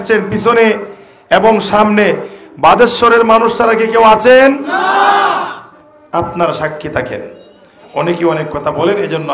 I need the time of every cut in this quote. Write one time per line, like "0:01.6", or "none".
none